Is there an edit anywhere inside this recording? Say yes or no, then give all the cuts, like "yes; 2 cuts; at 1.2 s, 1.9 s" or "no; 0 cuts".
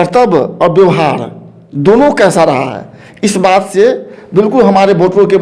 no; 0 cuts